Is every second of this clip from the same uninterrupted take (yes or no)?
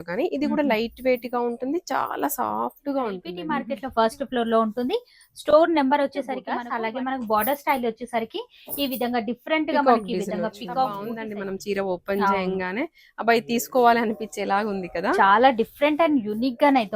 no